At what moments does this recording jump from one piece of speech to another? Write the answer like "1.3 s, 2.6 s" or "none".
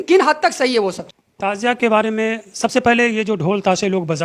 1.5 s